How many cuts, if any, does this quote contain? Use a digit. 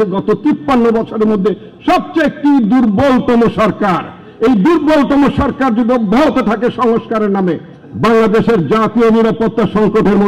0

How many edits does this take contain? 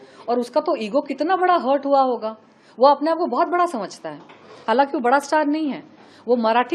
0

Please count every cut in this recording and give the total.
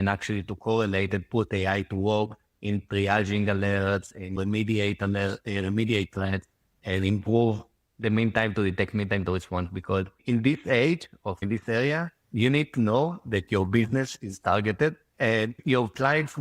5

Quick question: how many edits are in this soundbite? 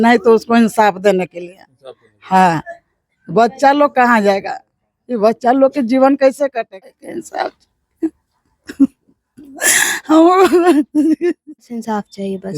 2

